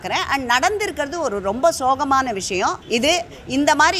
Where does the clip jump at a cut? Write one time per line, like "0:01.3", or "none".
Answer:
0:02.8